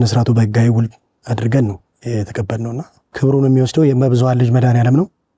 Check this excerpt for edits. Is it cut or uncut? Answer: cut